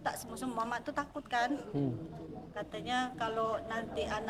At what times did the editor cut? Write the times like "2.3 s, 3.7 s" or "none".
none